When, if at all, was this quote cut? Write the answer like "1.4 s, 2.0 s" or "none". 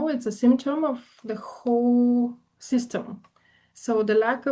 none